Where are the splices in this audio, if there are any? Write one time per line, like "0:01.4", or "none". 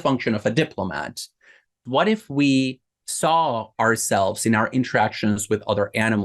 0:01.8